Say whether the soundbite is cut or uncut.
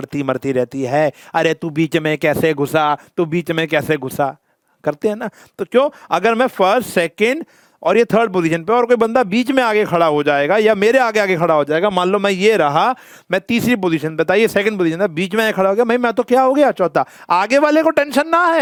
uncut